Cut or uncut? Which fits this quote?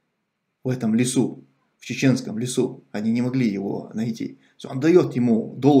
uncut